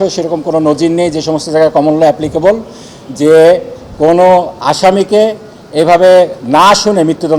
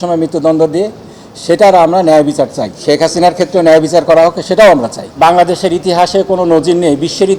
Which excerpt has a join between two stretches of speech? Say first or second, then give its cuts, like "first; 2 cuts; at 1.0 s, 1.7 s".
second; 2 cuts; at 2.7 s, 5.1 s